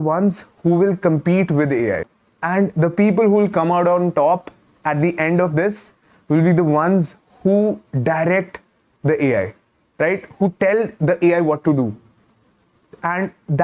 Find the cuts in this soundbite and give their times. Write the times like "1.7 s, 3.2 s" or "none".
none